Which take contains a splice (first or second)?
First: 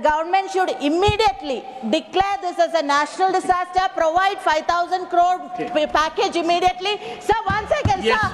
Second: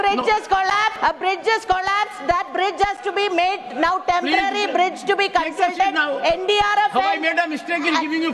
second